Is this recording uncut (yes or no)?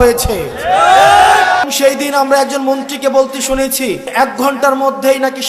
no